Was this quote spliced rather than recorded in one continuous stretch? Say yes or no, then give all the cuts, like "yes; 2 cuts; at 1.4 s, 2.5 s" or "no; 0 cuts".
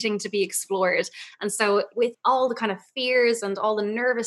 yes; 1 cut; at 2.2 s